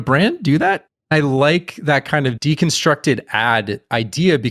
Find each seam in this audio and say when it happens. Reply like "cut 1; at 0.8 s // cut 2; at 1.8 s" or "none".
cut 1; at 0.9 s